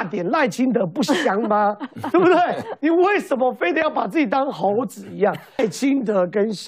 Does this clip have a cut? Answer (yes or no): yes